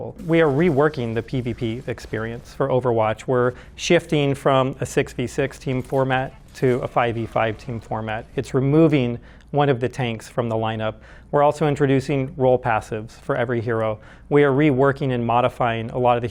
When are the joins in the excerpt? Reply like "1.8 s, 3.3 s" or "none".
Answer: none